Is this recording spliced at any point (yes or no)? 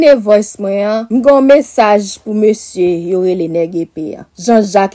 yes